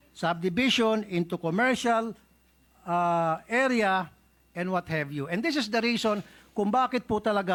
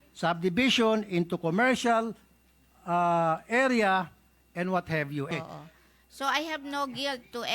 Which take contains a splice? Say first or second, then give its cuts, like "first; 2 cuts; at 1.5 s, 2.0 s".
second; 1 cut; at 5.3 s